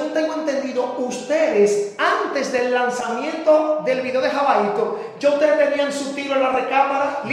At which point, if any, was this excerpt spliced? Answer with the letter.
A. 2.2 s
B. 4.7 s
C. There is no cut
C